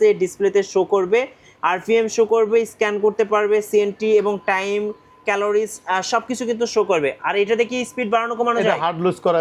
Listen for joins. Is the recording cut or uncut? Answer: uncut